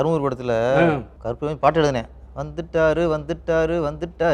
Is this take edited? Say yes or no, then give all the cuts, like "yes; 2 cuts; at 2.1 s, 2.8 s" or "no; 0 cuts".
no; 0 cuts